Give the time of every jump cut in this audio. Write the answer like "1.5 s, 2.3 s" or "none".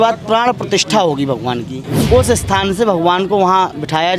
1.9 s